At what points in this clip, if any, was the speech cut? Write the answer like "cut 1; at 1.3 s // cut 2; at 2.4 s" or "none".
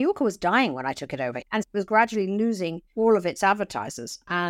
cut 1; at 1.4 s // cut 2; at 2.8 s